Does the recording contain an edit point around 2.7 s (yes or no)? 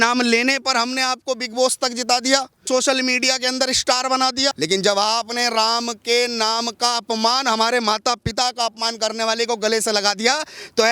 yes